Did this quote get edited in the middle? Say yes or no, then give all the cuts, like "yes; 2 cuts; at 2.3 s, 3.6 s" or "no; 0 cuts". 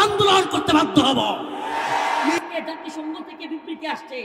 yes; 1 cut; at 2.4 s